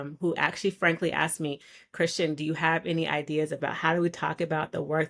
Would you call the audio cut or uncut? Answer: uncut